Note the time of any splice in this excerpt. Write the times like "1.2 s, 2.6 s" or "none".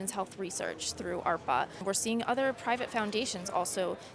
1.8 s